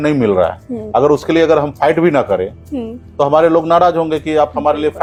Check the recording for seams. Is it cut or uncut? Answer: uncut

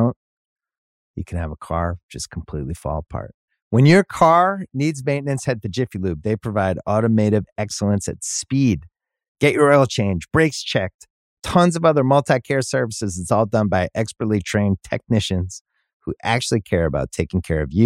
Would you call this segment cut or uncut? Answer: uncut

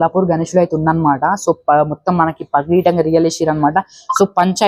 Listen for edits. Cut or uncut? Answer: uncut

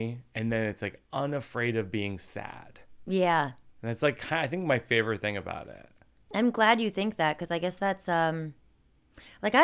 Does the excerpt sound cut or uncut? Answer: uncut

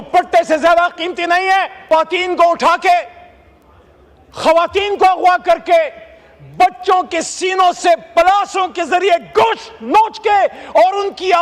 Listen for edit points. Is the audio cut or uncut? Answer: cut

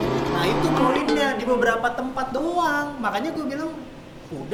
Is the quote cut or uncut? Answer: uncut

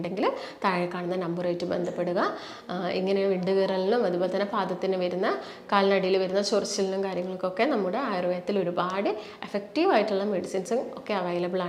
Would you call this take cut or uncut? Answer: uncut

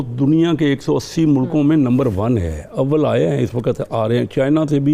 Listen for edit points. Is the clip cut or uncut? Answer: uncut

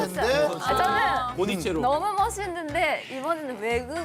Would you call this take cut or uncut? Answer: uncut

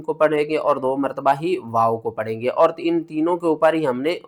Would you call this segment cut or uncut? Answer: uncut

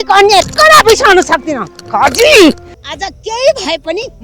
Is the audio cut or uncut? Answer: cut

